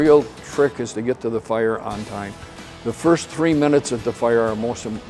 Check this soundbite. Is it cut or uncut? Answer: uncut